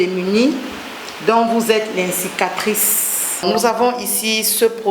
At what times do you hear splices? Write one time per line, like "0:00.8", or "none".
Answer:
0:03.4